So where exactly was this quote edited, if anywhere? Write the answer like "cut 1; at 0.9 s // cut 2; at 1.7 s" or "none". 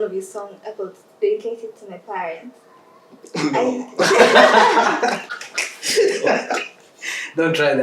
none